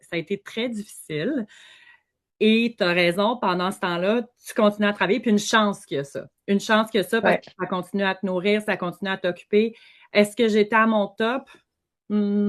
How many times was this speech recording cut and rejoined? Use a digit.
0